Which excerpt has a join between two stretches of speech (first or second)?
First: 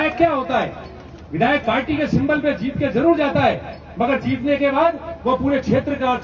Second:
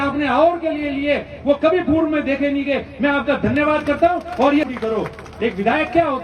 second